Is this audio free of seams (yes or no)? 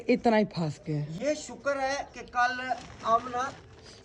yes